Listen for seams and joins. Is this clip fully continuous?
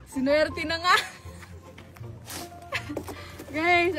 yes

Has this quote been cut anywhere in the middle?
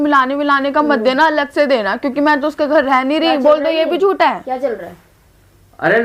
no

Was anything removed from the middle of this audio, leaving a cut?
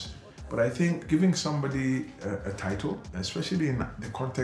yes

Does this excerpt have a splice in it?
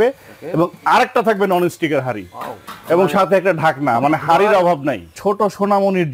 yes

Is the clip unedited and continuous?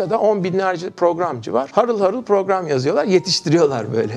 yes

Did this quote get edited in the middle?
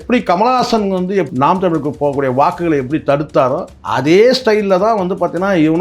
yes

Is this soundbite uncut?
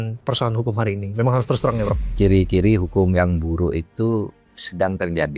no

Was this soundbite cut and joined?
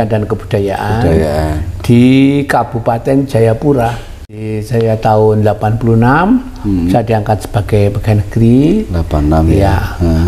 yes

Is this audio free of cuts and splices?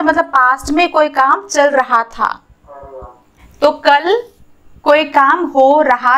yes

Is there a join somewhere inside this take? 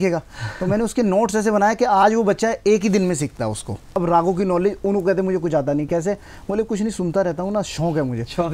yes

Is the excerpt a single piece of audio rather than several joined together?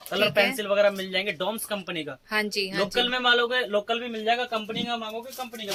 yes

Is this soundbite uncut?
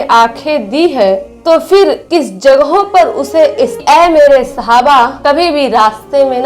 no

